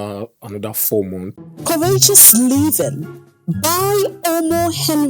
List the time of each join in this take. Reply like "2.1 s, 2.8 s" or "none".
1.3 s